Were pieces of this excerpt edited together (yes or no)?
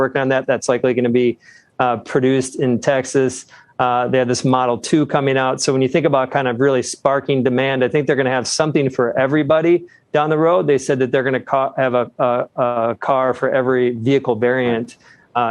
no